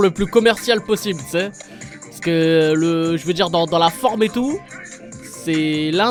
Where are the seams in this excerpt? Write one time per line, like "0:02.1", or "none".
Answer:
none